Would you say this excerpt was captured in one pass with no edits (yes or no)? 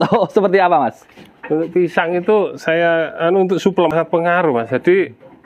no